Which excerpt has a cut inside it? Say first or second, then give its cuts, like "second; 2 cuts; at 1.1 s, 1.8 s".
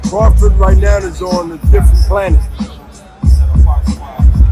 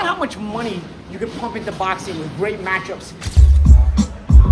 second; 1 cut; at 3.4 s